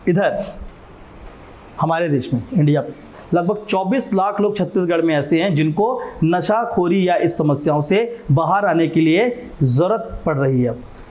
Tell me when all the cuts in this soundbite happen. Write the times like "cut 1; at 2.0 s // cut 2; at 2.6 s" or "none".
cut 1; at 3.1 s